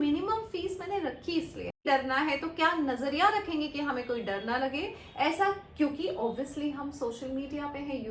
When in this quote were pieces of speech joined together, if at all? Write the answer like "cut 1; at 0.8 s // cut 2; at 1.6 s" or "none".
cut 1; at 1.8 s